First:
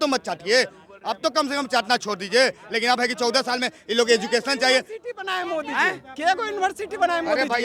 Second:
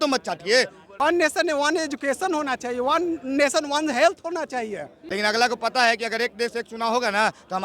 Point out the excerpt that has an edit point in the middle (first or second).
second